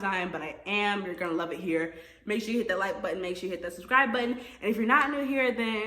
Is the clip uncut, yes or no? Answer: yes